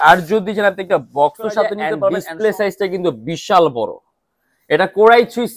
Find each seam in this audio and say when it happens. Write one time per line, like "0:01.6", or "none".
0:02.0

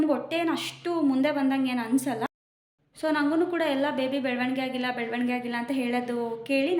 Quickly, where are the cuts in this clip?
none

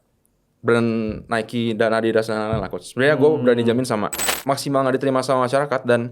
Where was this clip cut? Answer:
0:04.3

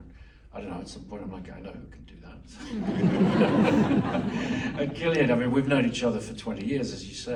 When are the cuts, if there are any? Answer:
none

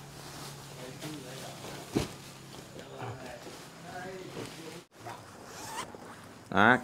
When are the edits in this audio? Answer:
0:04.9

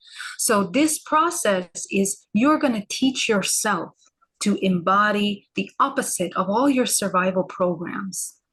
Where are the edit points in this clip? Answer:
none

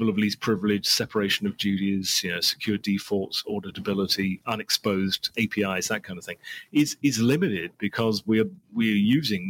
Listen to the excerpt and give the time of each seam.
0:04.4
0:05.3

